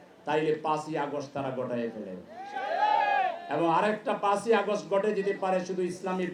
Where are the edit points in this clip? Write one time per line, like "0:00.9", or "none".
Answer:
none